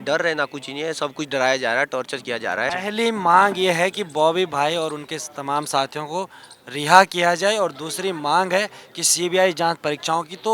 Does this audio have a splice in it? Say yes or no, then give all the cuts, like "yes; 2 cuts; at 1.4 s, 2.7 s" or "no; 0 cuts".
yes; 1 cut; at 2.7 s